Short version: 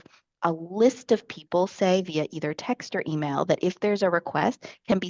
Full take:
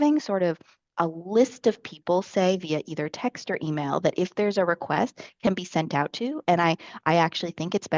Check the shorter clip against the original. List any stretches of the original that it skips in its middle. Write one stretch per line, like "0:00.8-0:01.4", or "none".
none